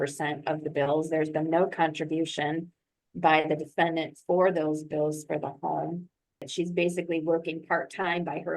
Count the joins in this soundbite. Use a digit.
1